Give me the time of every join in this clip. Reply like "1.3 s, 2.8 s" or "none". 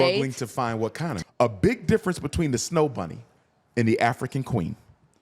1.1 s